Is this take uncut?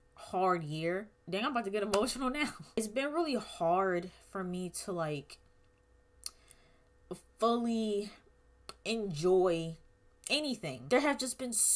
no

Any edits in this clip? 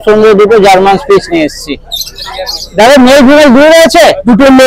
no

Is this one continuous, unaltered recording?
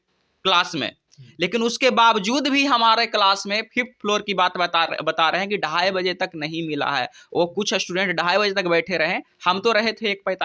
yes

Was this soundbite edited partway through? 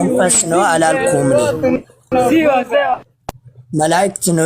no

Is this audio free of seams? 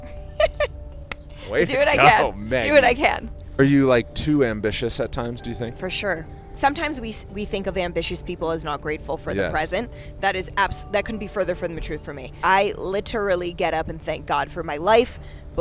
no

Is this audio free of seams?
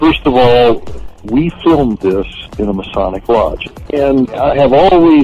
no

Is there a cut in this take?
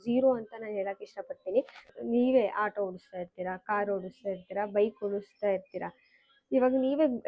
yes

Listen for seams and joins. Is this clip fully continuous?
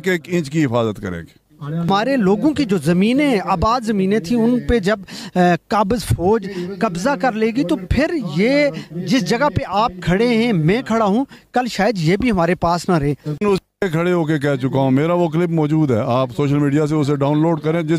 no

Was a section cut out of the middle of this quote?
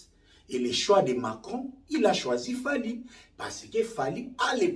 no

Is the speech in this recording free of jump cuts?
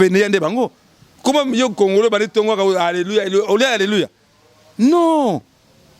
yes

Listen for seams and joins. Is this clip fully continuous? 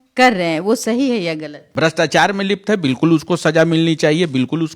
no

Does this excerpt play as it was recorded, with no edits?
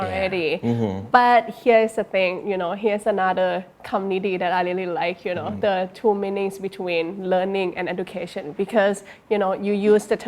yes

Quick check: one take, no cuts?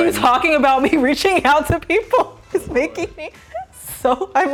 yes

